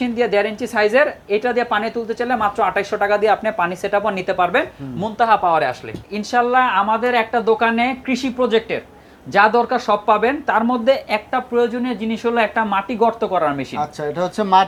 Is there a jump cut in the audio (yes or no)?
no